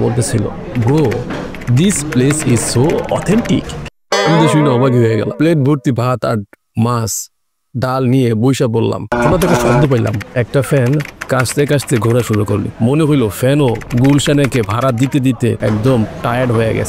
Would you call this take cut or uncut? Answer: cut